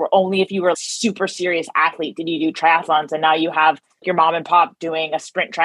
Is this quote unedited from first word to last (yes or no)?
no